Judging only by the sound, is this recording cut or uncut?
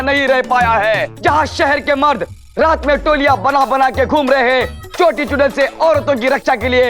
cut